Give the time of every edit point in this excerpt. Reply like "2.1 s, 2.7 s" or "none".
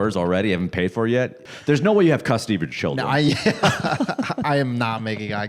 1.4 s